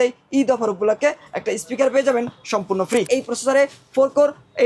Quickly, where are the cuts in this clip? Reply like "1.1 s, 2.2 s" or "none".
3.1 s